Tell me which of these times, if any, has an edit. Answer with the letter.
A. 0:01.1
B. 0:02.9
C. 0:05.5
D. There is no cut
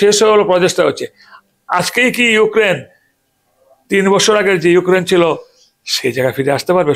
D